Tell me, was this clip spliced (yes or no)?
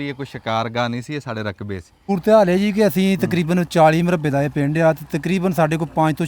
yes